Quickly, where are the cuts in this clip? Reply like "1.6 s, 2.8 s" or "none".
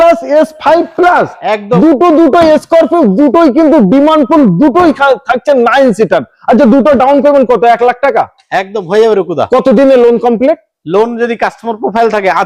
none